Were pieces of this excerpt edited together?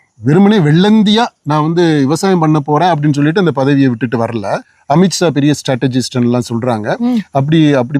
yes; 1 cut; at 4.7 s

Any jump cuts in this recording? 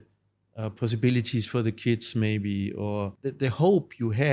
yes; 1 cut; at 3.1 s

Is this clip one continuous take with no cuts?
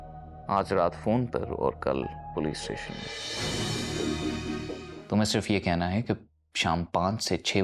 no; 1 cut; at 4.9 s

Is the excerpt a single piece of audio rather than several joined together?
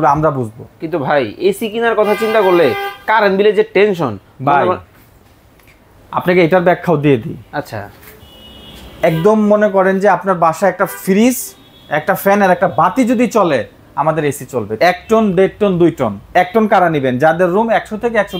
no; 1 cut; at 14.7 s

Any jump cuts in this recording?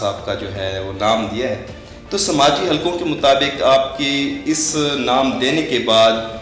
no; 0 cuts

